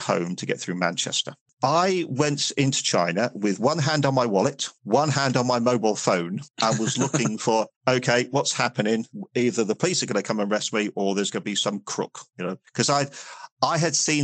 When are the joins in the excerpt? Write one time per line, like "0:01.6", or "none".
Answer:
0:01.4